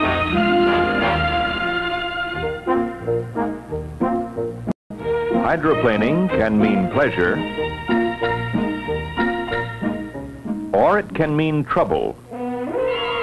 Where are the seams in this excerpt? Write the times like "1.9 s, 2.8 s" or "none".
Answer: 1.8 s